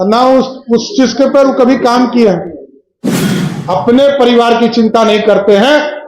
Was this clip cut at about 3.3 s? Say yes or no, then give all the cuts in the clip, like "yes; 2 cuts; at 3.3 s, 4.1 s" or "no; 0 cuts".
yes; 1 cut; at 3.3 s